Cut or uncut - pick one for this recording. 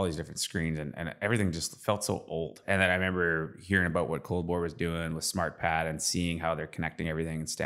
cut